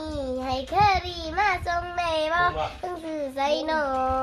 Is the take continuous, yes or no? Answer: yes